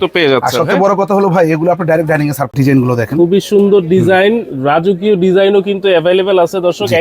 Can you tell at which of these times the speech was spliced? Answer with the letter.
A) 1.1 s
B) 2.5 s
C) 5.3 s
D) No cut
B